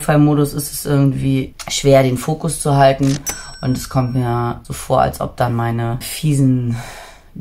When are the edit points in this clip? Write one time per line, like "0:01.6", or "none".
0:01.6
0:04.7
0:06.1